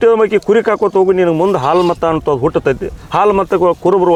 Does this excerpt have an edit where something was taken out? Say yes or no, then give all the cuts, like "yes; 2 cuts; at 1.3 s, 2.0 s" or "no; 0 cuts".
no; 0 cuts